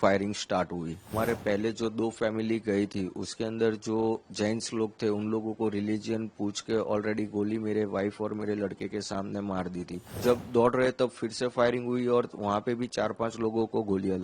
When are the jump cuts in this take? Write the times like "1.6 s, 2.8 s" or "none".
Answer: 1.1 s, 10.1 s